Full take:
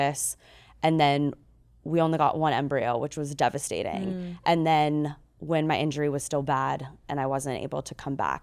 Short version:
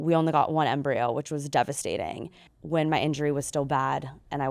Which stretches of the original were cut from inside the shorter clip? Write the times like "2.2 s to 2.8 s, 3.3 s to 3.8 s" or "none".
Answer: 4.3 s to 5.2 s